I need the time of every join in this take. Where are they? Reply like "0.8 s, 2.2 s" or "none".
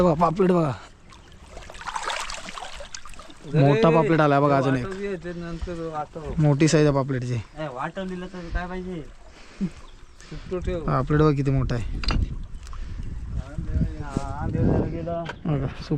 none